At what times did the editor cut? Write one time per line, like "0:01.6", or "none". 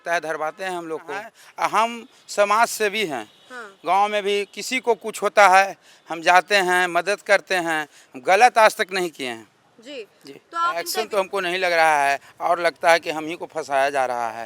0:01.4
0:10.8